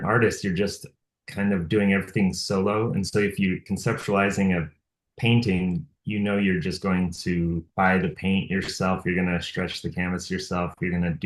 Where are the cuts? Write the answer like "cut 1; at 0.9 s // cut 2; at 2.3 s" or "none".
cut 1; at 3.6 s // cut 2; at 7.7 s